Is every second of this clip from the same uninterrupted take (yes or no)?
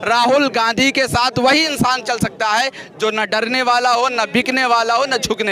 yes